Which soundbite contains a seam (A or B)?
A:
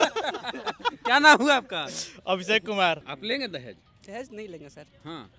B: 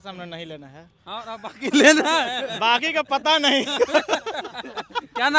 A